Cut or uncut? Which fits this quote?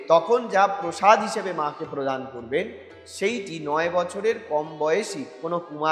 uncut